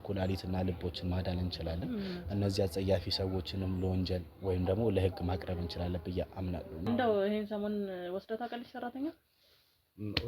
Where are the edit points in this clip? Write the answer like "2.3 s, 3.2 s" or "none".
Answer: 6.9 s